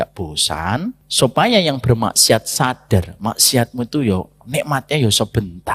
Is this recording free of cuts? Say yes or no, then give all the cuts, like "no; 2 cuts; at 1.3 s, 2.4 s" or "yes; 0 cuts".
no; 1 cut; at 1.0 s